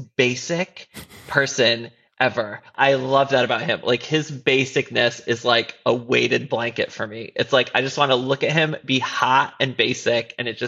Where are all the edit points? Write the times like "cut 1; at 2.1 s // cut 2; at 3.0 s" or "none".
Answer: cut 1; at 2.7 s